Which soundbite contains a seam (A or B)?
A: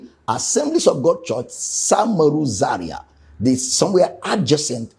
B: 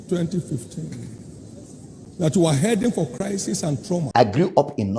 B